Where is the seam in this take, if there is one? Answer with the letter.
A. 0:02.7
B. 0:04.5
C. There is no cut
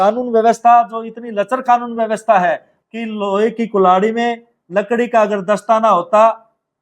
A